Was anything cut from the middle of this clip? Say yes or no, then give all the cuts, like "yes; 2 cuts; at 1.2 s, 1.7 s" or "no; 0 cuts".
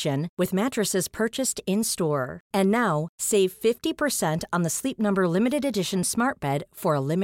no; 0 cuts